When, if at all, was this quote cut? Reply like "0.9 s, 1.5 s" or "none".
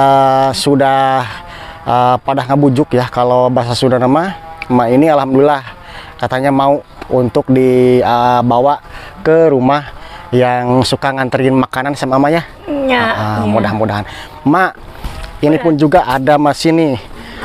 none